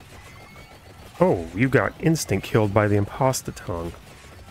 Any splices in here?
yes; 1 cut; at 1.2 s

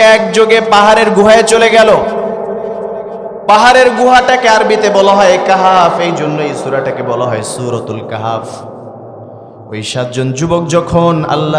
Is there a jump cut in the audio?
no; 0 cuts

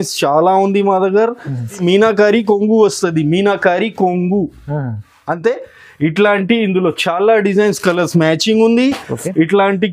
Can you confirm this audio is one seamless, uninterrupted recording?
no; 1 cut; at 1.8 s

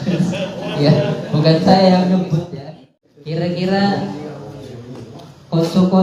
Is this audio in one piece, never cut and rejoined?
no; 1 cut; at 2.5 s

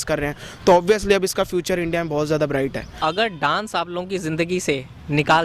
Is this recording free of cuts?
no; 1 cut; at 2.9 s

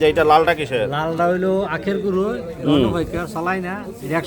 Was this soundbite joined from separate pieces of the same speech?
no; 0 cuts

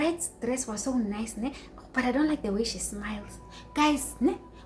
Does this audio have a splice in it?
no; 0 cuts

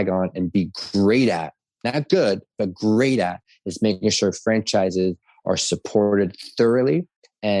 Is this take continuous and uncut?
yes; 0 cuts

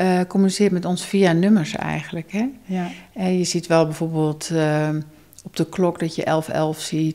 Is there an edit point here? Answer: no; 0 cuts

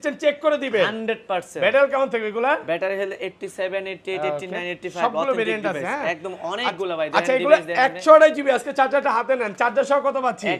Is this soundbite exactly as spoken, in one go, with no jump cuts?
yes; 0 cuts

